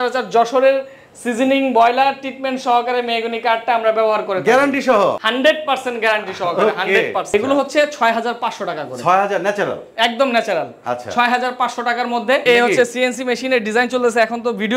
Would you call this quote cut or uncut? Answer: cut